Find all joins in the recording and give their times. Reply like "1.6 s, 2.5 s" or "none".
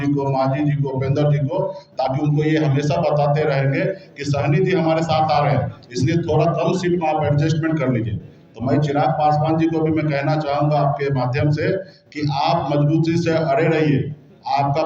none